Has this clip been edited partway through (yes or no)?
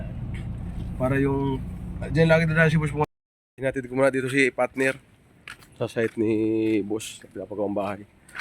yes